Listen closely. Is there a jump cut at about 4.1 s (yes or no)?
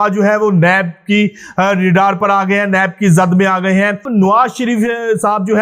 yes